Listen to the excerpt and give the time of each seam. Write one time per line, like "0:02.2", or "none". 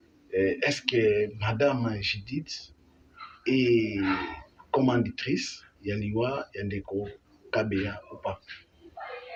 none